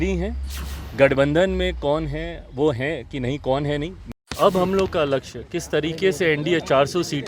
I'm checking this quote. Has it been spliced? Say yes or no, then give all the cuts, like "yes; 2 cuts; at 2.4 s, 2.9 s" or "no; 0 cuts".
yes; 1 cut; at 4.3 s